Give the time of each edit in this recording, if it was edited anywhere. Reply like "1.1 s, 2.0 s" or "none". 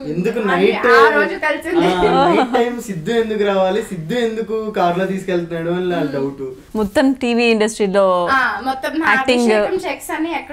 6.5 s